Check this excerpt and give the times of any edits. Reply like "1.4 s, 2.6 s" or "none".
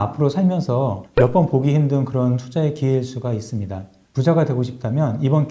none